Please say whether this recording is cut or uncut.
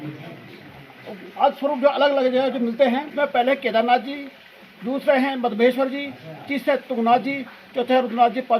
cut